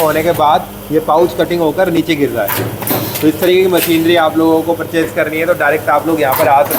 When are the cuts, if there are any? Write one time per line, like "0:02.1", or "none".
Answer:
none